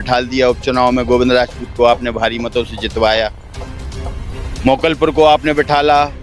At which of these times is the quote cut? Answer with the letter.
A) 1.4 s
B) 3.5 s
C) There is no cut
C